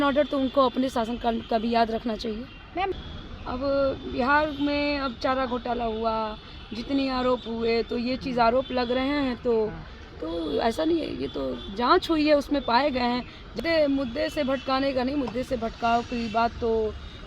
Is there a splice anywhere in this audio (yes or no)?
yes